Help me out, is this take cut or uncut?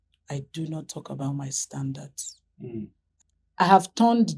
cut